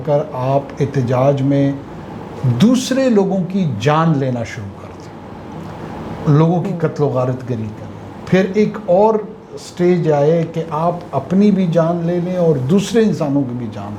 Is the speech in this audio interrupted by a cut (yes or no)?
no